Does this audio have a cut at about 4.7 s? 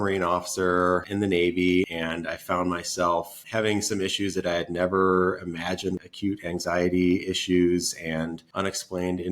no; 5 cuts; at 1.1 s, 1.9 s, 3.4 s, 6.0 s, 8.4 s

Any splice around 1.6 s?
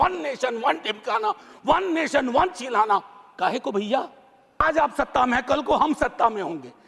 no; 1 cut; at 4.6 s

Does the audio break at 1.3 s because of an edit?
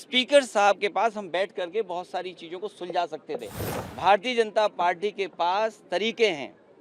no; 1 cut; at 3.6 s

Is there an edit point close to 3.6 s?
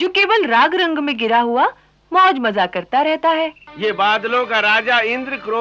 yes; 1 cut; at 3.6 s

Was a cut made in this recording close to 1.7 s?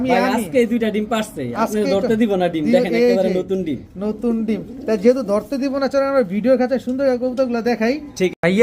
no; 0 cuts

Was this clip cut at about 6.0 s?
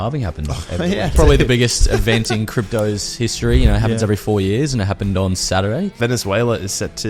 yes; 2 cuts; at 1.1 s, 6.0 s

